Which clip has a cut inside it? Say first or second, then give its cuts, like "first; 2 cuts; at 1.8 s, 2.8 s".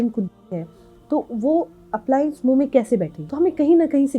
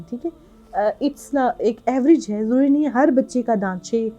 first; 1 cut; at 3.2 s